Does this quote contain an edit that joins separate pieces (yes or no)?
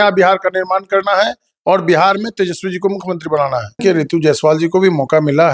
yes